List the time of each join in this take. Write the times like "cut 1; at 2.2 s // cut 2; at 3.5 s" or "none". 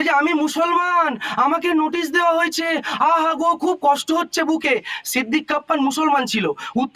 none